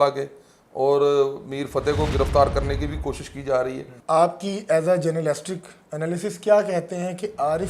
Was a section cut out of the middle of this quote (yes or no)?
yes